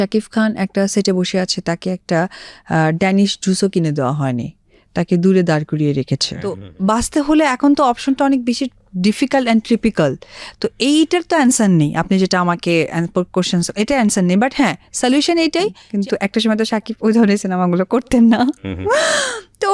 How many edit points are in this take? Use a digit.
2